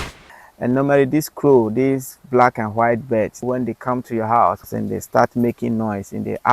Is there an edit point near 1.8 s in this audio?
no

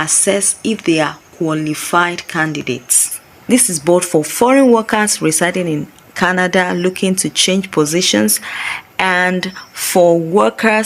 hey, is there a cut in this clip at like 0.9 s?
no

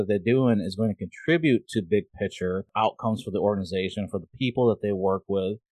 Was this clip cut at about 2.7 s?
yes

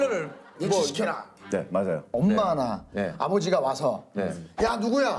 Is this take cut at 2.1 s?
yes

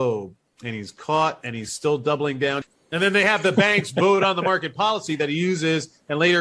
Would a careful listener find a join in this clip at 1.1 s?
no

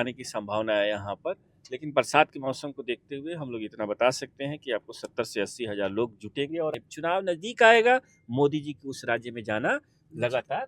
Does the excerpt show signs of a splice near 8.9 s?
no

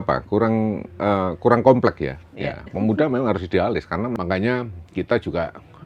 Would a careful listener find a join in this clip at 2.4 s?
no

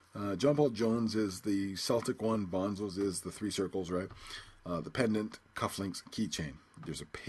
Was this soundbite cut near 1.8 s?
yes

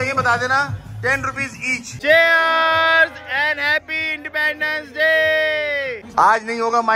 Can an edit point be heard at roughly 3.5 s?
no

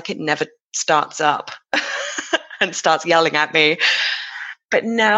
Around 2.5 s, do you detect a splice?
no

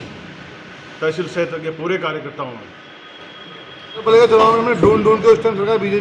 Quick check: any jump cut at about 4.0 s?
yes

